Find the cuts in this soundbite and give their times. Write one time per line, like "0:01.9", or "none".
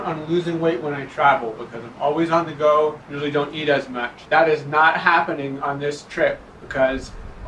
none